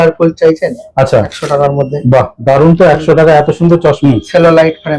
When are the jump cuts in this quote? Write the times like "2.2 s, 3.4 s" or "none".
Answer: 1.3 s, 4.0 s